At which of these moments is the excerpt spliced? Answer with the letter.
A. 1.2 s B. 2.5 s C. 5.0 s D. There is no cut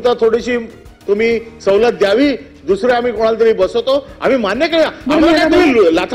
D